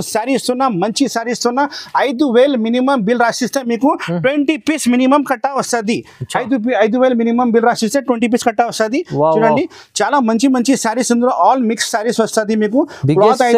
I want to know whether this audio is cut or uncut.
uncut